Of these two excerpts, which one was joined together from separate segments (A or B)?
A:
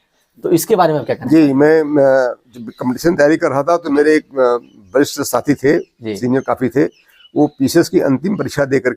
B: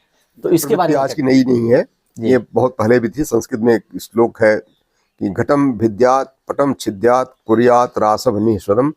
B